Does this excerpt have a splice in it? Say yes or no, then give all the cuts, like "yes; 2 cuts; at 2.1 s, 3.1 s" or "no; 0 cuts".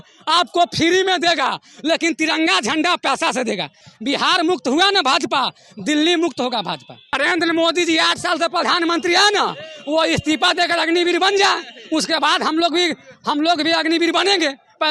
yes; 2 cuts; at 3.8 s, 7.1 s